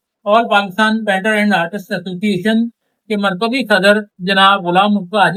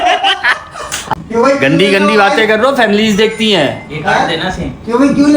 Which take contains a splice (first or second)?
second